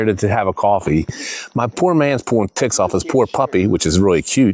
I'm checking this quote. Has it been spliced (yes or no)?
no